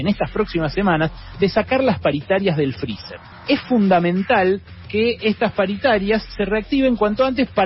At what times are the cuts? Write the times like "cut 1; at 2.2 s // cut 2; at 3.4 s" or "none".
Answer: cut 1; at 3.3 s

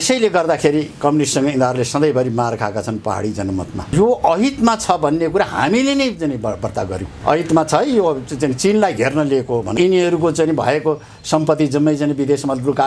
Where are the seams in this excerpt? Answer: cut 1; at 3.8 s // cut 2; at 7.1 s // cut 3; at 9.7 s

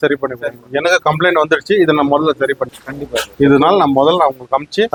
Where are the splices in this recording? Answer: none

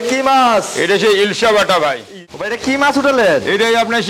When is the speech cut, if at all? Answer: cut 1; at 2.1 s

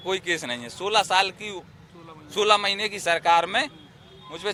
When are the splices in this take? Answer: none

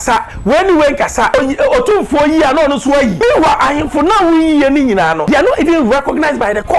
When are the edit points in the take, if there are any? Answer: cut 1; at 1.3 s // cut 2; at 3.2 s // cut 3; at 5.2 s

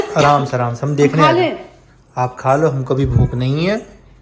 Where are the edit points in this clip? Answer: none

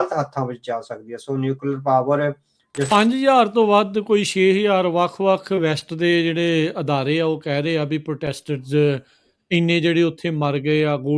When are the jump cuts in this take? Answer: cut 1; at 2.9 s

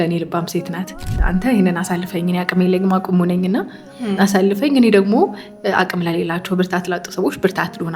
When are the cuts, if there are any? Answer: cut 1; at 1.1 s

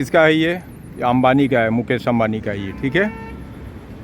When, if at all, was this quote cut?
none

